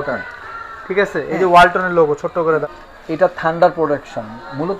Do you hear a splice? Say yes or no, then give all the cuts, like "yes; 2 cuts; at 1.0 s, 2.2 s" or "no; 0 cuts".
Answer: yes; 1 cut; at 2.6 s